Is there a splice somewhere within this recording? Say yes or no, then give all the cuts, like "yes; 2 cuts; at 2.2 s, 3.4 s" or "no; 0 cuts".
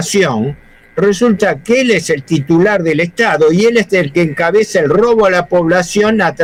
no; 0 cuts